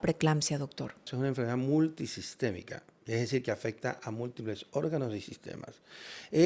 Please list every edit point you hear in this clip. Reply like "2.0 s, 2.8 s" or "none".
1.1 s